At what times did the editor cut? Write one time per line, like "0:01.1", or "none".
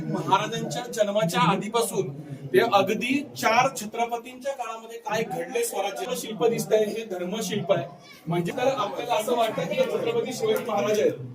0:06.0
0:08.5